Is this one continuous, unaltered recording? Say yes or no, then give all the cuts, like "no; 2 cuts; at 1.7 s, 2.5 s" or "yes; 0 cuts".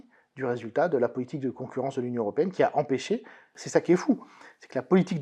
no; 1 cut; at 3.5 s